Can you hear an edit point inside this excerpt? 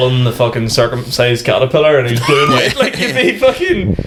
no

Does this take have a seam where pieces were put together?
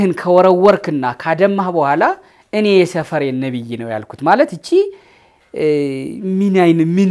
no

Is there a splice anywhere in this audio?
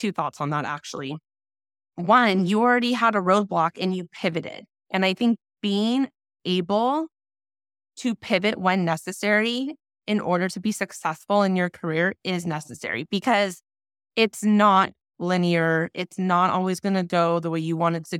no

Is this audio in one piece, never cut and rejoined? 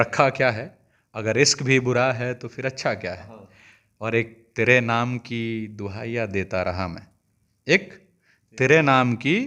yes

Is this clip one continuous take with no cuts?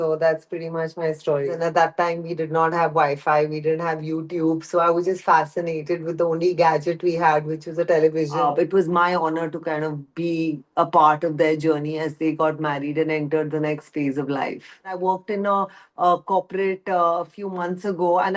no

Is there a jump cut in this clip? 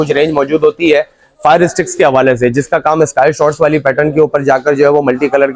no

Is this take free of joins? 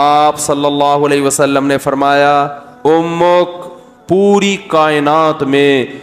yes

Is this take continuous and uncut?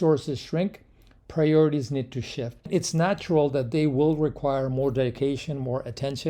no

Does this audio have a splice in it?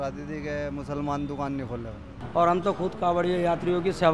yes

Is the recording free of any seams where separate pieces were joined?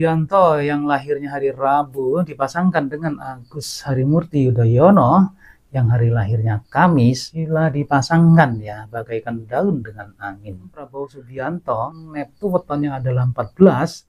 no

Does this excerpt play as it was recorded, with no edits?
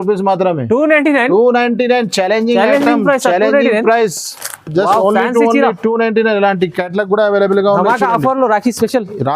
yes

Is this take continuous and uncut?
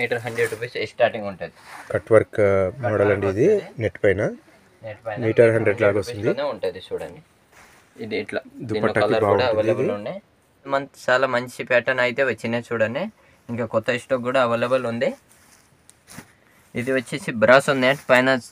no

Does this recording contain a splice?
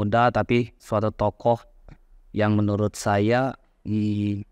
no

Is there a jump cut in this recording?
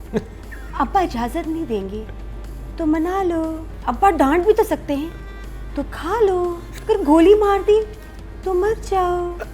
yes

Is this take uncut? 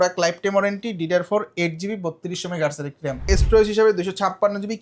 no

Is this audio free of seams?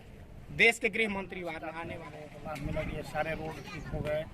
no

